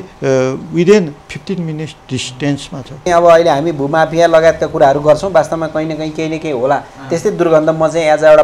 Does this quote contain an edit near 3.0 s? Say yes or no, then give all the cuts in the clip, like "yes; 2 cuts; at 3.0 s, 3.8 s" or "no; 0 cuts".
yes; 1 cut; at 3.0 s